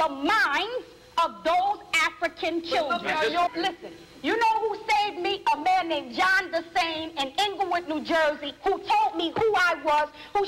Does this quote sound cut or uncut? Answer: cut